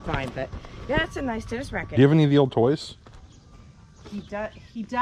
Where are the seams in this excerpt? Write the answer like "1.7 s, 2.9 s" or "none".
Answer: 1.9 s

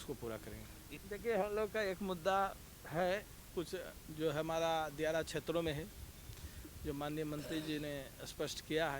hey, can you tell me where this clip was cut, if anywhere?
0.9 s

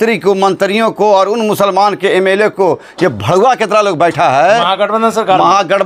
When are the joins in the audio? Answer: none

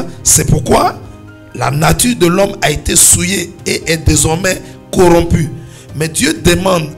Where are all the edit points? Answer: none

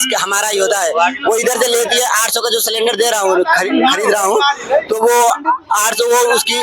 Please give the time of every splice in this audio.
none

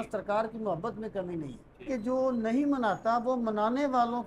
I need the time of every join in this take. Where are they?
1.9 s

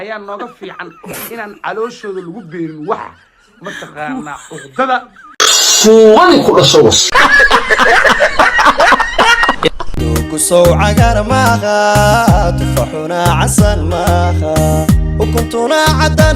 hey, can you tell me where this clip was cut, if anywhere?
9.9 s

